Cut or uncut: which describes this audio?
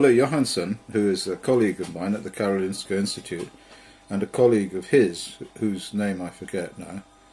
cut